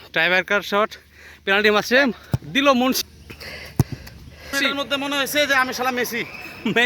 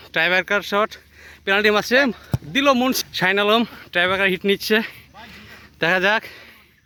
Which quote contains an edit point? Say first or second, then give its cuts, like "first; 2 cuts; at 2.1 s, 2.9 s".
first; 2 cuts; at 3.1 s, 4.5 s